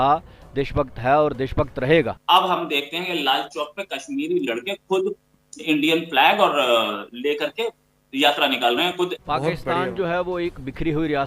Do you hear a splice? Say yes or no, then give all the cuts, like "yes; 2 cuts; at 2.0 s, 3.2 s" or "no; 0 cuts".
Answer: yes; 2 cuts; at 2.2 s, 9.2 s